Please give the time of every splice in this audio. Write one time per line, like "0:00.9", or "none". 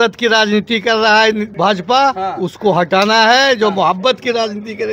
0:01.5